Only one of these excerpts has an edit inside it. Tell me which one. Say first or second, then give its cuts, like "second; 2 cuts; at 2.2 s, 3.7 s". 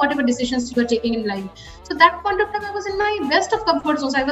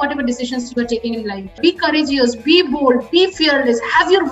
second; 1 cut; at 1.6 s